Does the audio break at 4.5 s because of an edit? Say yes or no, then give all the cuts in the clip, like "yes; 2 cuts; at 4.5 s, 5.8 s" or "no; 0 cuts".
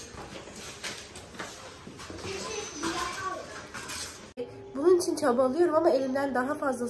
yes; 1 cut; at 4.5 s